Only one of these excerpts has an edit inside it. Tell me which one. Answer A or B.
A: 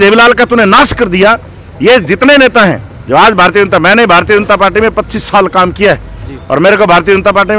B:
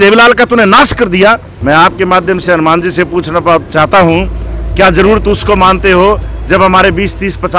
B